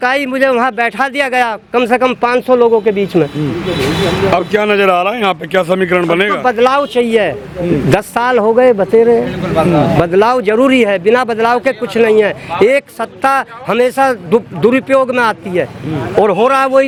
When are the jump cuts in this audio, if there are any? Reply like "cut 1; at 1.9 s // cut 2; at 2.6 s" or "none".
none